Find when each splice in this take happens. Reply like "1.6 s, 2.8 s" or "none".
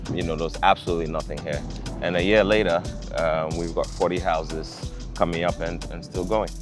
none